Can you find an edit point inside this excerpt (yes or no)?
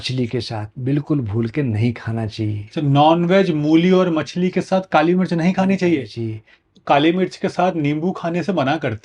yes